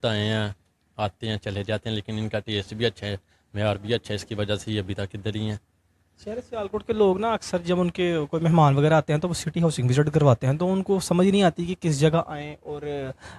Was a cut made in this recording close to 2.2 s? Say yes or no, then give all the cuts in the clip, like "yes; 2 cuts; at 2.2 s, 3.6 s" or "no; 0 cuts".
no; 0 cuts